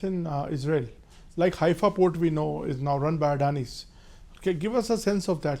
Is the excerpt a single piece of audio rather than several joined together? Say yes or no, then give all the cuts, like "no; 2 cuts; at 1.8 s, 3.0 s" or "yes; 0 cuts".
yes; 0 cuts